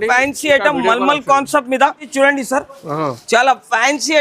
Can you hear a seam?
yes; 1 cut; at 2.1 s

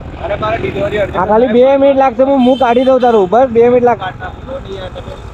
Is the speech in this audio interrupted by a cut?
no; 0 cuts

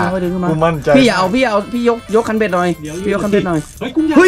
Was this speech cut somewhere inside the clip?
no; 0 cuts

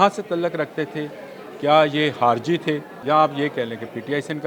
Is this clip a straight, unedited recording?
no; 1 cut; at 2.9 s

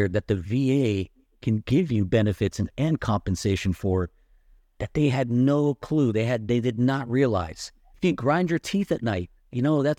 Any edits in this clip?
yes; 1 cut; at 7.9 s

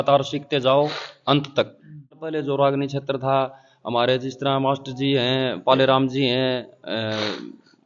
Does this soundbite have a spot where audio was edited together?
yes; 1 cut; at 2.3 s

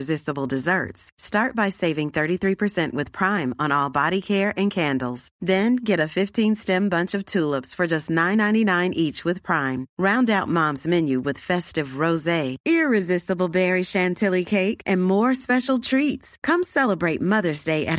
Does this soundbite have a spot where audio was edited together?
no; 0 cuts

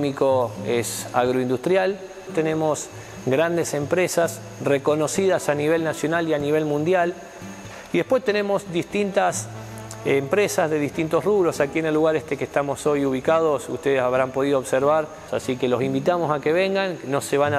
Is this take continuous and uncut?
no; 2 cuts; at 2.3 s, 15.3 s

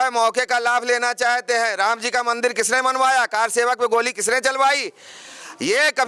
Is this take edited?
no; 0 cuts

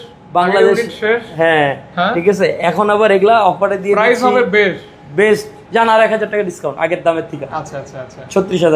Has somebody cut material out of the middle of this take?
no; 0 cuts

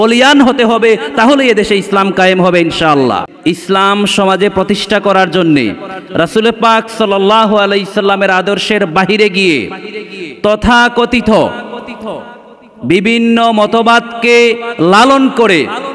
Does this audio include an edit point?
yes; 1 cut; at 3.3 s

